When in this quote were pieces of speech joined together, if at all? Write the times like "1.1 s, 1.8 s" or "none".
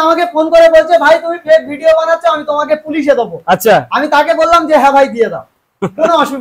none